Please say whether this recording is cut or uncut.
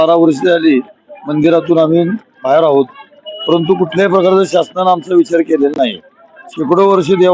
uncut